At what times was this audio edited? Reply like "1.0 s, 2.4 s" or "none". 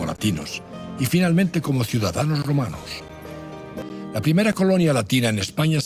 3.7 s